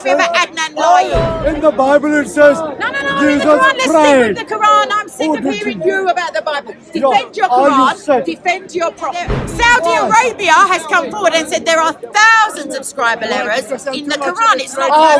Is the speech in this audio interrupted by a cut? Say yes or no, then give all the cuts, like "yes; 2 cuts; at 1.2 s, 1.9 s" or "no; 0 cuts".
yes; 2 cuts; at 1.3 s, 9.4 s